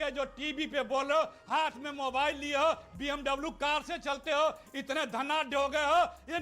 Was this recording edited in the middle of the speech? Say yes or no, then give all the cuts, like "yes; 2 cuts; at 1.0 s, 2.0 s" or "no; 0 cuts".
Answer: yes; 1 cut; at 1.4 s